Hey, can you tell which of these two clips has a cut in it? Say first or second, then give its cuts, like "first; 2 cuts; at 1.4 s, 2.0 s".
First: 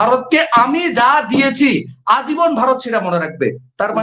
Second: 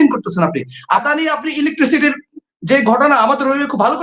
second; 1 cut; at 1.0 s